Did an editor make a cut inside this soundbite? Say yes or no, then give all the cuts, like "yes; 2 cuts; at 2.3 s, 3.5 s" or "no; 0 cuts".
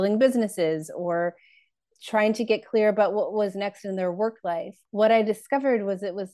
yes; 1 cut; at 4.8 s